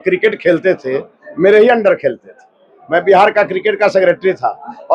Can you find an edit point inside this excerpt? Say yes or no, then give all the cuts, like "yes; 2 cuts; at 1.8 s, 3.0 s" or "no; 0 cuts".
no; 0 cuts